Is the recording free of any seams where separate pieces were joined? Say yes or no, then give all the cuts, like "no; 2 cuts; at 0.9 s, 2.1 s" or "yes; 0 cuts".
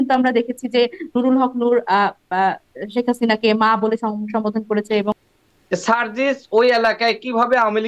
no; 1 cut; at 5.3 s